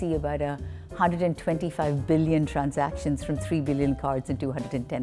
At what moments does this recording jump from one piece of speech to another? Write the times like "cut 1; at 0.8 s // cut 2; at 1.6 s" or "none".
none